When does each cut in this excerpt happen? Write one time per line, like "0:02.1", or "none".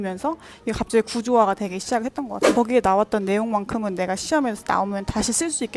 0:02.4

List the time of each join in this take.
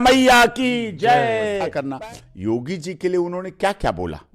0:01.8

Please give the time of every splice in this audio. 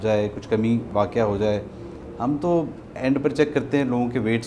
none

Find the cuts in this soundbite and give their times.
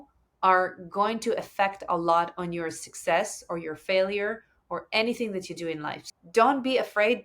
0:06.0

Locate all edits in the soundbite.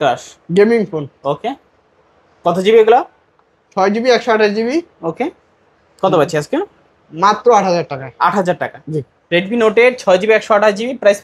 none

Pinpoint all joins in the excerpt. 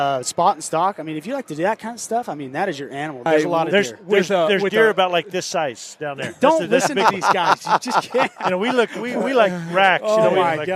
0:03.2

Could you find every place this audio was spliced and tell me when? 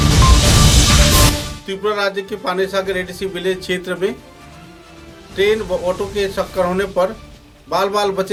none

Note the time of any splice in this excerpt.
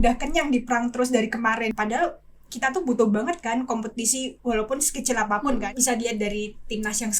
0:01.7
0:05.6

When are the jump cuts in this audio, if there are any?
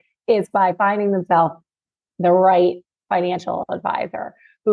none

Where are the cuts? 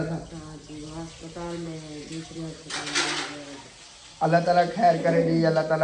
none

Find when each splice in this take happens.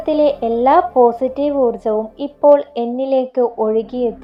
none

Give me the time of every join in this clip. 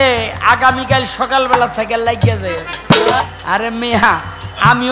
0:03.2

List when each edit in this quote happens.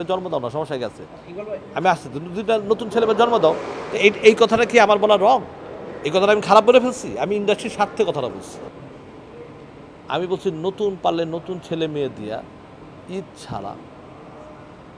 0:08.7

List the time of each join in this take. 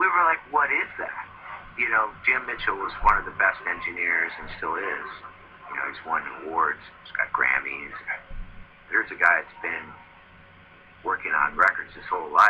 none

